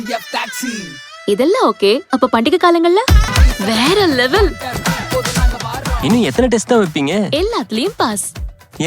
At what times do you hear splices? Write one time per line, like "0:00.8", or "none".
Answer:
0:03.3